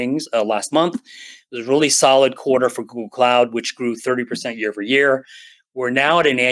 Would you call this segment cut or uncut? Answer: uncut